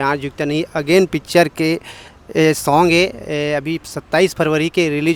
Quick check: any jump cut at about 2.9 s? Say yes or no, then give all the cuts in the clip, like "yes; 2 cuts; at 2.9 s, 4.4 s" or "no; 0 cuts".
no; 0 cuts